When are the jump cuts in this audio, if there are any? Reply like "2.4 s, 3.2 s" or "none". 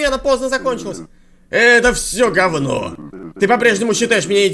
none